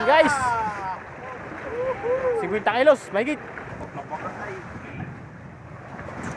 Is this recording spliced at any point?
yes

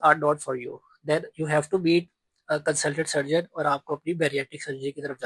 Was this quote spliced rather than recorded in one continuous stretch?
no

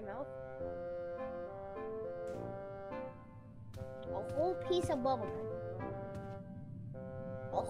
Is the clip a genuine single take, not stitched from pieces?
yes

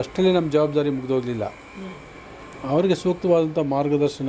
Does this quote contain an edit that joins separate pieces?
no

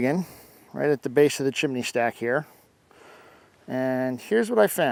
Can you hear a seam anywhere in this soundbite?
no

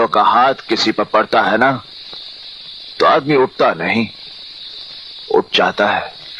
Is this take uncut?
yes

